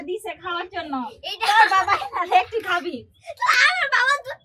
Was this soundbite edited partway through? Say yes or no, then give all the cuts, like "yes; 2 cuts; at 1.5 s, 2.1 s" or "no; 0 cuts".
no; 0 cuts